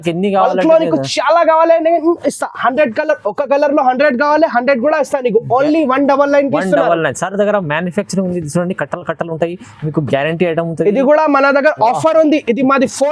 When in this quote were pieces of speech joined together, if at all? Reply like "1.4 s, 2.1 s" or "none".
none